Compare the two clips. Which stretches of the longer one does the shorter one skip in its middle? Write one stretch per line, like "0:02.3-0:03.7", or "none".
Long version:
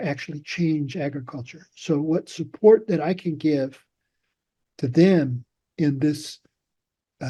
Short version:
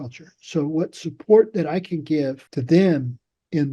0:03.8-0:04.7